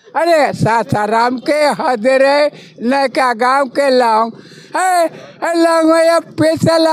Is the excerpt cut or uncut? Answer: uncut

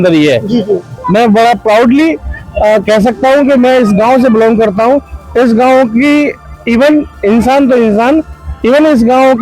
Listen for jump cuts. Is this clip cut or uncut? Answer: cut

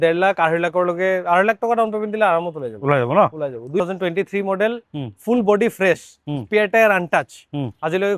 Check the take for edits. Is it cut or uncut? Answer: cut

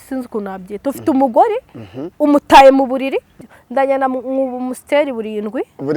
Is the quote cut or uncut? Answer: cut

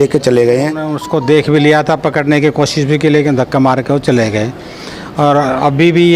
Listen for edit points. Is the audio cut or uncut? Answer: cut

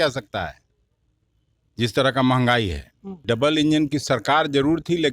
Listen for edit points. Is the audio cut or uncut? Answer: cut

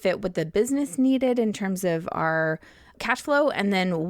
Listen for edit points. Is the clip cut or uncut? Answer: cut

